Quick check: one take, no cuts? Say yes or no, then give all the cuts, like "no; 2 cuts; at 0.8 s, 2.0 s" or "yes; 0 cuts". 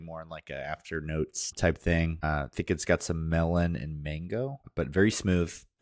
no; 3 cuts; at 1.5 s, 2.2 s, 4.6 s